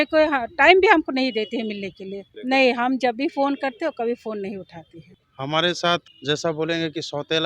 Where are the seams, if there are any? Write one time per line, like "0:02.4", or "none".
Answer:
0:02.3
0:05.1
0:06.0